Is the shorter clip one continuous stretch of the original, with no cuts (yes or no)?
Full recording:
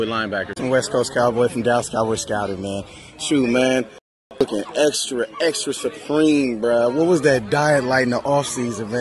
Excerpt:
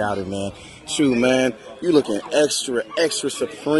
no